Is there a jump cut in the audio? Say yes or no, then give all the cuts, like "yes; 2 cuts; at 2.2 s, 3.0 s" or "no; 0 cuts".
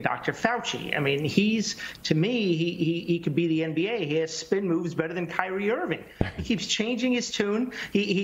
no; 0 cuts